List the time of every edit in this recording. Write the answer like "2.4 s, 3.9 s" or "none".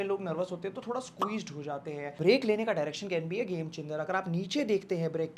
2.2 s